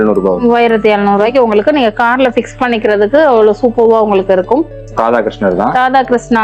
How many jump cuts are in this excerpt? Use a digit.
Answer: 1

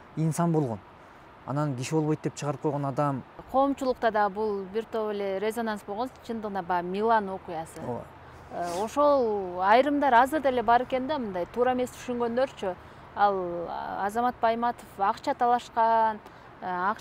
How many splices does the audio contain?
1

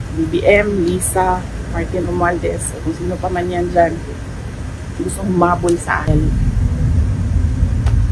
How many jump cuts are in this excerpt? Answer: 0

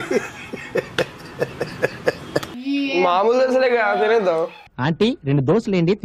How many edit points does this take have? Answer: 1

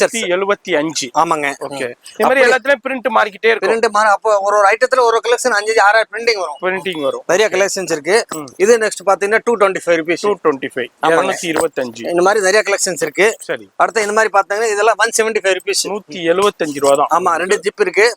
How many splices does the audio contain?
0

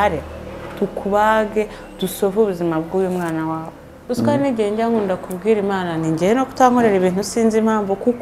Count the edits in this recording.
1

